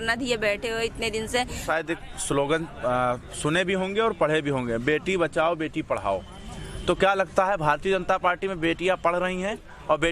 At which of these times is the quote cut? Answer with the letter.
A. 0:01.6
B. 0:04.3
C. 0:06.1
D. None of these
A